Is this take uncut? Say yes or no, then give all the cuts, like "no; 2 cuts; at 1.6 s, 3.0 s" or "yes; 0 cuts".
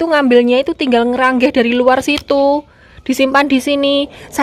yes; 0 cuts